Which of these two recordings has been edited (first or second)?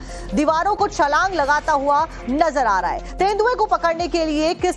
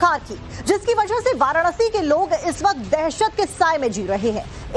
second